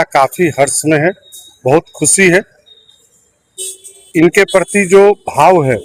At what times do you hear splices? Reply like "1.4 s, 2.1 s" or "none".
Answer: none